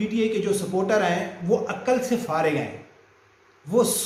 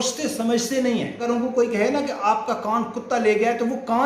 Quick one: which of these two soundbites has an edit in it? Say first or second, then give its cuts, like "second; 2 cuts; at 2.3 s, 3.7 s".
second; 1 cut; at 1.2 s